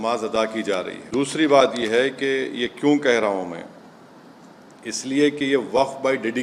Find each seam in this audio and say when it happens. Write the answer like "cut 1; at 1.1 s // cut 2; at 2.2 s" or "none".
none